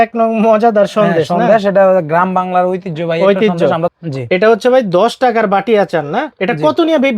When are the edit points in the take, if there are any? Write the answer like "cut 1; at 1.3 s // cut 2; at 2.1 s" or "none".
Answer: cut 1; at 3.9 s